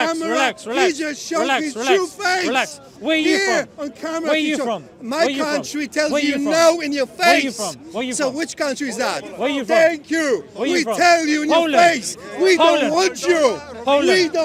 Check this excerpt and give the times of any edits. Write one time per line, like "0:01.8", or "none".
none

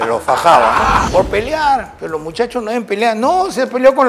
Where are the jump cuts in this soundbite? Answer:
0:01.1
0:02.0

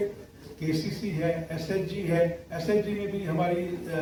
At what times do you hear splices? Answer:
none

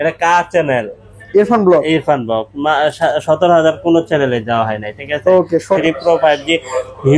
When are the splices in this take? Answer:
0:05.8

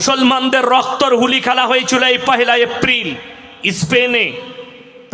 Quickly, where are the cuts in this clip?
none

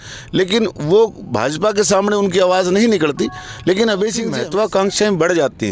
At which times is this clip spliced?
0:04.3

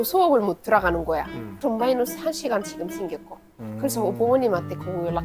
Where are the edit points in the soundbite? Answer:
0:01.6

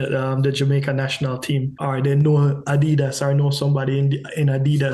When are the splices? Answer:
0:01.7

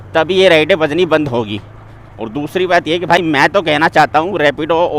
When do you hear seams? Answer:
none

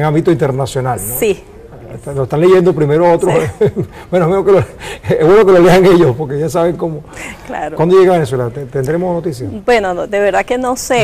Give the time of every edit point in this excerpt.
0:02.9

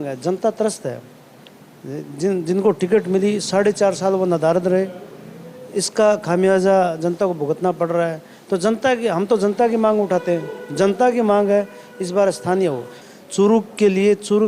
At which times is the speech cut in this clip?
0:13.0

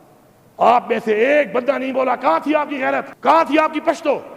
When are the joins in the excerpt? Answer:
0:03.1

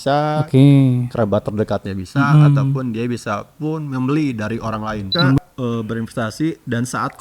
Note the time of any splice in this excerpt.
0:05.4

